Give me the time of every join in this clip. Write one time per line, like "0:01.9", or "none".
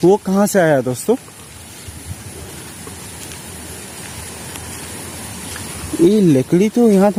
none